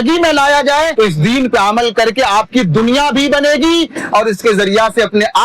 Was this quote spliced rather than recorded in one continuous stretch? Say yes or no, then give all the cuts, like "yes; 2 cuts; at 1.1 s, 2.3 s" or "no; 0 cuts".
yes; 1 cut; at 0.9 s